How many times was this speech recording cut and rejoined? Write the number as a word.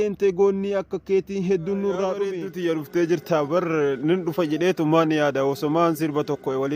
one